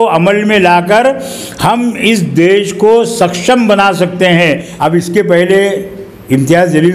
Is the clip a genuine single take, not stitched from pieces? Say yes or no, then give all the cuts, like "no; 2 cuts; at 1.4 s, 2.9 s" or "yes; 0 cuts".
no; 1 cut; at 4.7 s